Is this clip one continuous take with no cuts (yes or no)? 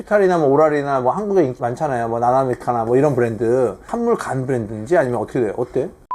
yes